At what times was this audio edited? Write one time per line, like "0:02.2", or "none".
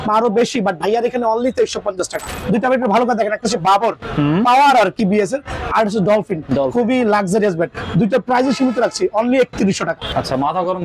0:02.3
0:10.0